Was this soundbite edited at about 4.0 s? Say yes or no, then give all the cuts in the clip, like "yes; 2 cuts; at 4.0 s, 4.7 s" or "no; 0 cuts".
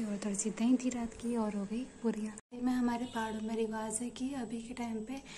no; 1 cut; at 2.4 s